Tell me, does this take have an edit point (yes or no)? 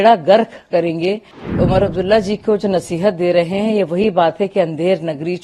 yes